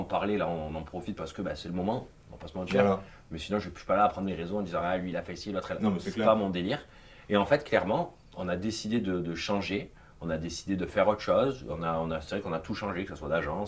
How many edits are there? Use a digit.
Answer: 0